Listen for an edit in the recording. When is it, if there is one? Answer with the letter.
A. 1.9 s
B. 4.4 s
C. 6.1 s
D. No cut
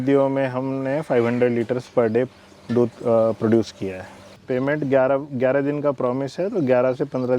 B